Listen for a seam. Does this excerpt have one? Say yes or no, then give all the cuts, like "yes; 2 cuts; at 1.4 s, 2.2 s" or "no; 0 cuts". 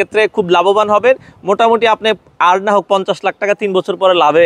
no; 0 cuts